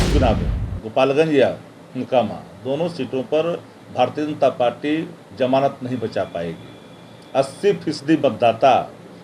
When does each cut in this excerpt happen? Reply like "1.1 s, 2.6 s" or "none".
none